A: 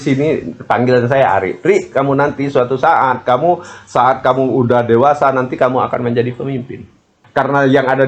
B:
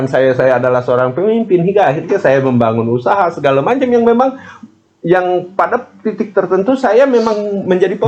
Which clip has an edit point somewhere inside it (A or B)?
A